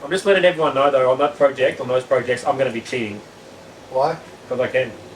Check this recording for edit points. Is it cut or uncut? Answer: uncut